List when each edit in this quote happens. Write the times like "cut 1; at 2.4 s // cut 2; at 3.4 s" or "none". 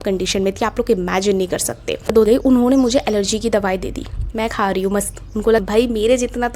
cut 1; at 2.3 s // cut 2; at 5.6 s